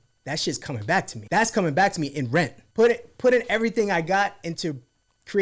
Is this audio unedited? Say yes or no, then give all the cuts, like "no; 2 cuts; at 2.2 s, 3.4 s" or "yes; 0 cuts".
no; 2 cuts; at 1.2 s, 2.6 s